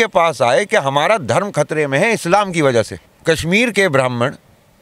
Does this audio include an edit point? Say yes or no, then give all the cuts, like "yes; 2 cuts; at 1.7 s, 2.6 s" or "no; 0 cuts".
yes; 1 cut; at 3.0 s